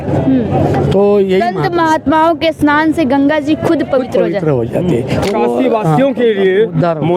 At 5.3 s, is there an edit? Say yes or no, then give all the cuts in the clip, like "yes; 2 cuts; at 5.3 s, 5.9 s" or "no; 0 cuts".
yes; 1 cut; at 5.3 s